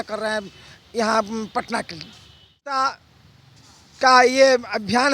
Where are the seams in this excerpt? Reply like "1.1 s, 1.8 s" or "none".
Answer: 2.6 s